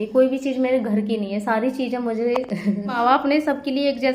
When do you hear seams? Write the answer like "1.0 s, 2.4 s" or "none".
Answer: 3.0 s